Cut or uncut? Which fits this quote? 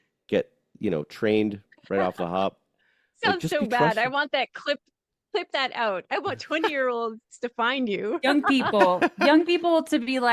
uncut